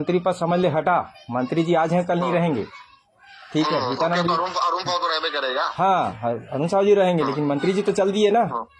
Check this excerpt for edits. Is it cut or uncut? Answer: uncut